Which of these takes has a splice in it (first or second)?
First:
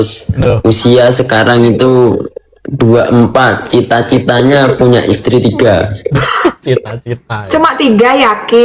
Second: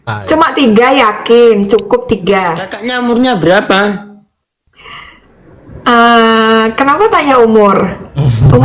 second